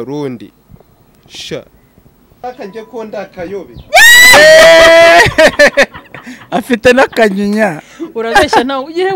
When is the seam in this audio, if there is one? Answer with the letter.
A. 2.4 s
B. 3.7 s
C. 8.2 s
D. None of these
A